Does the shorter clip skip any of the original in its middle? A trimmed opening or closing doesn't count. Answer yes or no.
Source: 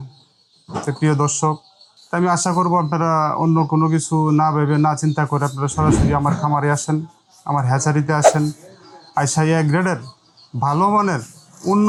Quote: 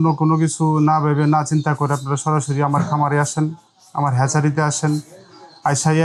no